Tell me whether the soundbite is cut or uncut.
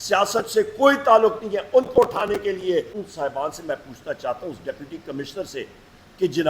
cut